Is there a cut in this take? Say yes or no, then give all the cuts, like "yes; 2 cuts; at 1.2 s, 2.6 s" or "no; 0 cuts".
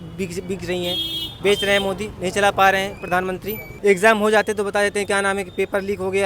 yes; 1 cut; at 3.7 s